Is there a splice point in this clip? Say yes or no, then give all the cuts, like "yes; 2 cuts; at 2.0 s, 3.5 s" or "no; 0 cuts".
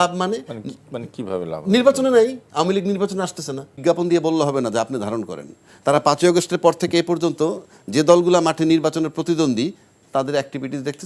yes; 1 cut; at 3.8 s